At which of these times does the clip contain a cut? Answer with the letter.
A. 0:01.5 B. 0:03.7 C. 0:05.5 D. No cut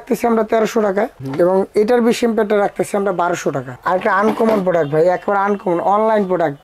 B